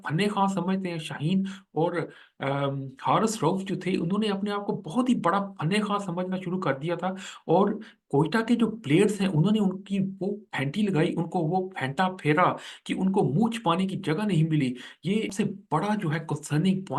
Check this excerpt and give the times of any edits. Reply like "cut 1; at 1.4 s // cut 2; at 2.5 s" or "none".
cut 1; at 15.3 s